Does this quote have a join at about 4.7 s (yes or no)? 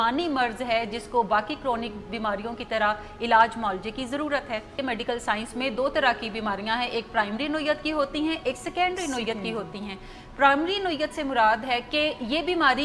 yes